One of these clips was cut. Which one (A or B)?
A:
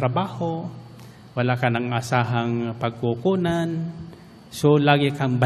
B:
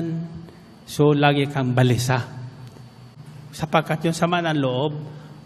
B